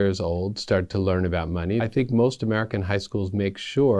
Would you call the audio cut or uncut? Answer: cut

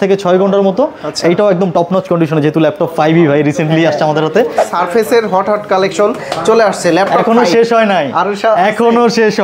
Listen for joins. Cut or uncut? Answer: cut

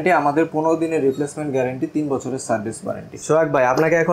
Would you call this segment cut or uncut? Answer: cut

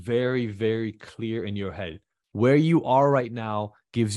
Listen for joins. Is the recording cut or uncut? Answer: uncut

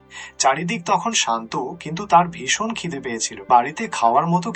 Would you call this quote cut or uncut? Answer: cut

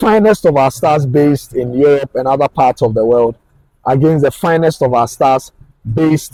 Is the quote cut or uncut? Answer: uncut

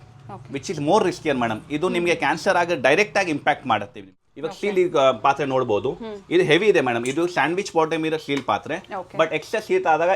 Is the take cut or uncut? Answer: cut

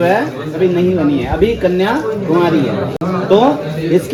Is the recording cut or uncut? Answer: uncut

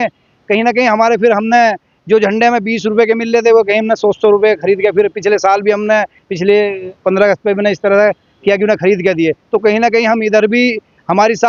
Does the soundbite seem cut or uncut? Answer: uncut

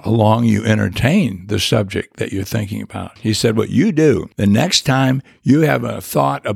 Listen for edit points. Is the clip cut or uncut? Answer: cut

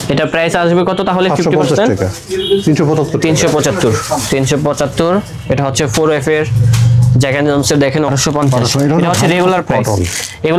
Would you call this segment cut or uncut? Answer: cut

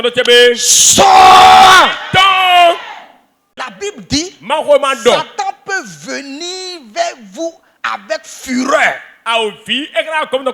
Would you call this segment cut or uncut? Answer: cut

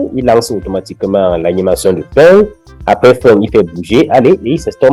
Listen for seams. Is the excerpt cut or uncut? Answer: uncut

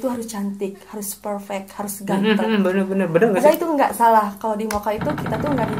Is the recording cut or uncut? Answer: uncut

